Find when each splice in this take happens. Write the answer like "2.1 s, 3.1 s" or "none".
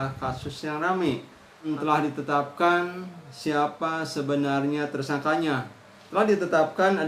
1.7 s

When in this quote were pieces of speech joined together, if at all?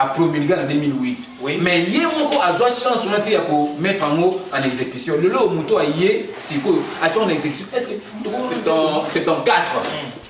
8.6 s

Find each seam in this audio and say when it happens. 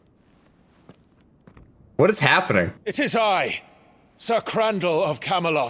2.8 s

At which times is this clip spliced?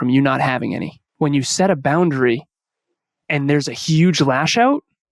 1.0 s

